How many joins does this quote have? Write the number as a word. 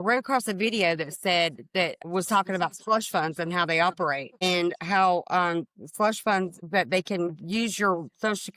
zero